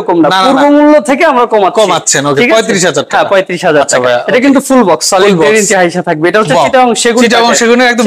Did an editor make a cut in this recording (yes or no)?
no